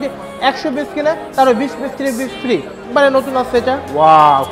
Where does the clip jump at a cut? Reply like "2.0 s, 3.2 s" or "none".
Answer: 2.9 s